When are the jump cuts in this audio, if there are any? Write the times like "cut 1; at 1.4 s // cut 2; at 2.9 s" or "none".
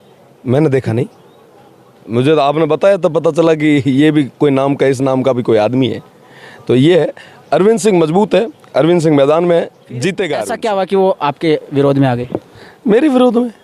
cut 1; at 10.4 s